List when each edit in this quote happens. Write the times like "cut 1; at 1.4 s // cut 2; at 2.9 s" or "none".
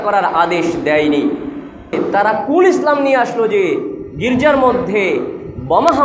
cut 1; at 1.9 s